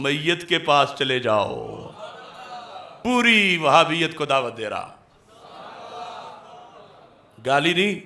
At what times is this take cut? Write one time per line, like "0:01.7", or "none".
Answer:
0:03.0